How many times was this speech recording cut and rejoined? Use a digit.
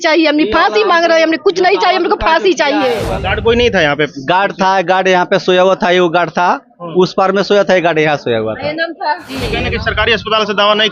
2